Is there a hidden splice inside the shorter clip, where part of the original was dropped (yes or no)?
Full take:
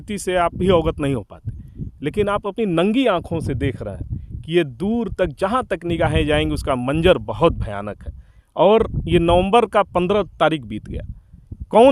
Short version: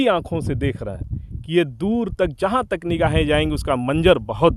no